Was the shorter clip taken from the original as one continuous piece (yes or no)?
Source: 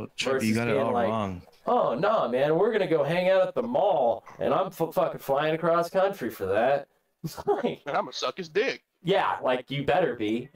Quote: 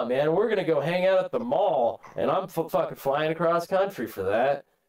yes